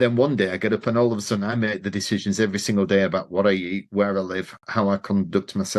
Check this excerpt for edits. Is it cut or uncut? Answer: uncut